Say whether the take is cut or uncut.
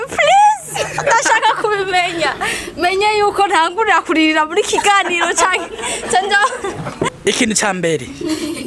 cut